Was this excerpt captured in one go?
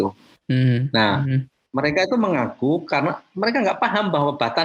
yes; 0 cuts

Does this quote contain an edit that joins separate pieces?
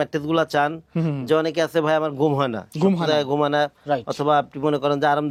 no; 0 cuts

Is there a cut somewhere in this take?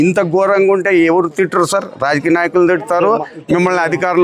no; 0 cuts

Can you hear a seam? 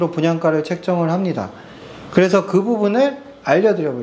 no; 0 cuts

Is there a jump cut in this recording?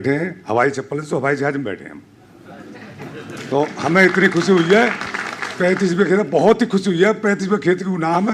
no; 0 cuts

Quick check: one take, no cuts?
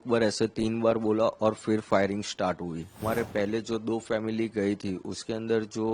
no; 1 cut; at 3.0 s

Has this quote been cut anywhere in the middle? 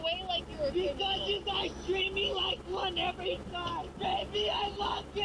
no; 0 cuts

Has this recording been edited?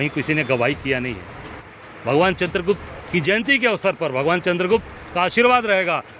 yes; 1 cut; at 1.6 s

